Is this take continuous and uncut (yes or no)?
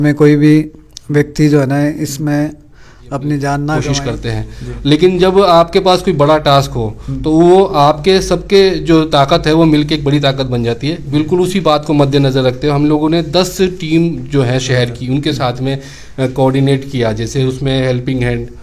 no